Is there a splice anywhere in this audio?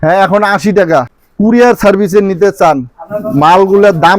yes; 1 cut; at 1.2 s

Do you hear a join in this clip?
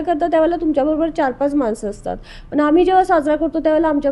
no; 0 cuts

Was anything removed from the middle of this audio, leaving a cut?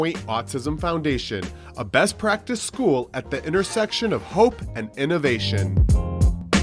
yes; 1 cut; at 5.7 s

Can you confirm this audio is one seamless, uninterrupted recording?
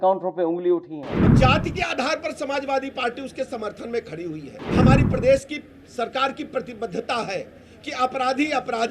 no; 2 cuts; at 1.3 s, 4.6 s

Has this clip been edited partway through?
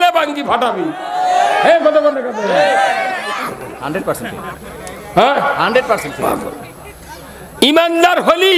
no; 0 cuts

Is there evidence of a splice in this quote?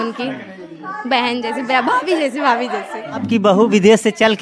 yes; 1 cut; at 3.2 s

